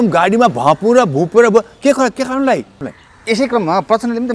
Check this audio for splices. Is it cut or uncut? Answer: cut